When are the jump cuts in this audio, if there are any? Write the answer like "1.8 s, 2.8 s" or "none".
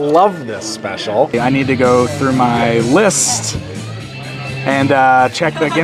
1.3 s